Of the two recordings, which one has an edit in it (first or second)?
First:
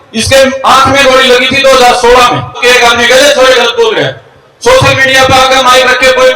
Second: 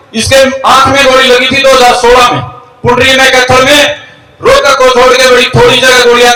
first